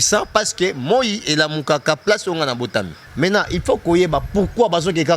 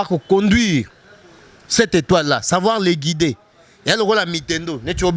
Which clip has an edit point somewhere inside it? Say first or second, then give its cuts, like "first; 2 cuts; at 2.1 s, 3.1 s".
first; 1 cut; at 3.0 s